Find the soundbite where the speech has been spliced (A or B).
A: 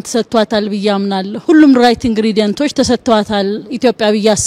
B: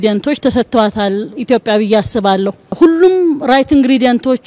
A